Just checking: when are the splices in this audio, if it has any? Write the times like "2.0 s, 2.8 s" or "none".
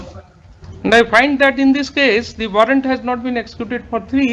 none